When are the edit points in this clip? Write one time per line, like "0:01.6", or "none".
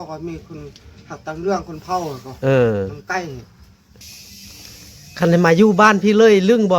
0:03.9